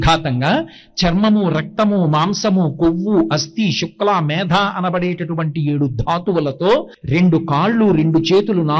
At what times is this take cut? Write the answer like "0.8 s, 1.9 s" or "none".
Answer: 7.0 s

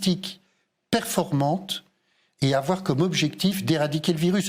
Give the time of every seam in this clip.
none

